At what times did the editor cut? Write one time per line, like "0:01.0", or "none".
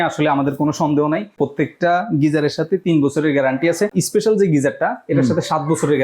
0:01.3
0:03.9